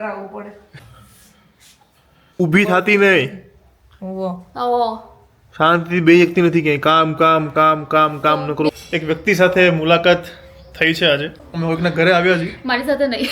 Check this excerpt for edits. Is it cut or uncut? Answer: cut